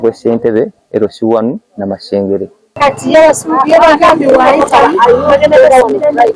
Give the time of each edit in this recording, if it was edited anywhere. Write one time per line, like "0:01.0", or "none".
0:02.8